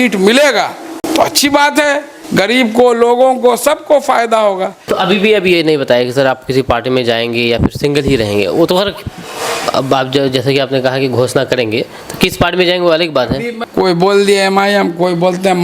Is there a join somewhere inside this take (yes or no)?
yes